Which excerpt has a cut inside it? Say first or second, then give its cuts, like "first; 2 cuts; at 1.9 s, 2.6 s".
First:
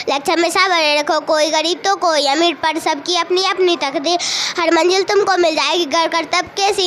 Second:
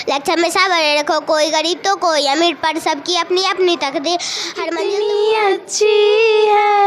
second; 1 cut; at 4.6 s